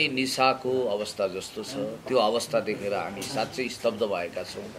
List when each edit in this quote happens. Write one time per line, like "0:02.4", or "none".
none